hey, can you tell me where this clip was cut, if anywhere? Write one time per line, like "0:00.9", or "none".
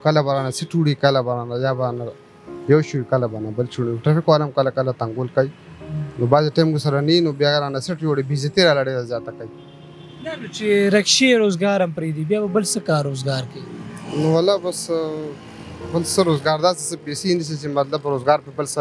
none